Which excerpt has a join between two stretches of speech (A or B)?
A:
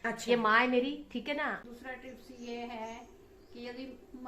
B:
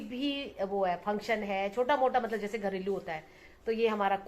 A